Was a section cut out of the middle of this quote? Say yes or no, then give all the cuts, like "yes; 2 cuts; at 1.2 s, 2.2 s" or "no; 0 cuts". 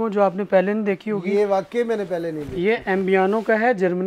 no; 0 cuts